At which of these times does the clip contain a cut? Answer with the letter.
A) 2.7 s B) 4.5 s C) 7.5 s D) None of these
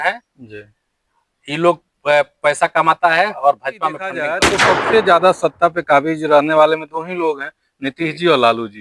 B